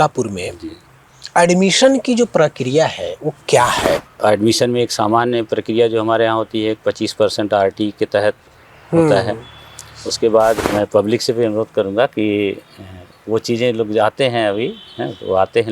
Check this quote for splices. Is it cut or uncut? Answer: cut